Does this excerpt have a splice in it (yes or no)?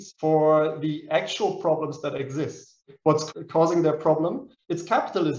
yes